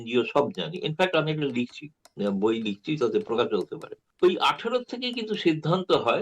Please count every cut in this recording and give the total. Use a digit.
1